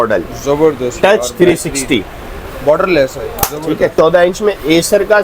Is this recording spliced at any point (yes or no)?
yes